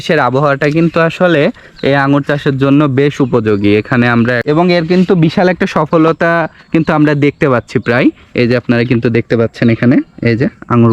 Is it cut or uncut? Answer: cut